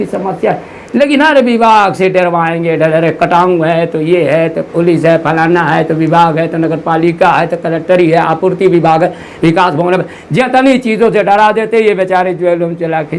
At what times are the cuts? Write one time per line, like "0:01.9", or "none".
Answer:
none